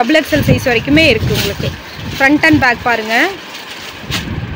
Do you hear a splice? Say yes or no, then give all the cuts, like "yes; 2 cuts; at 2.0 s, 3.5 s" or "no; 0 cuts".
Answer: no; 0 cuts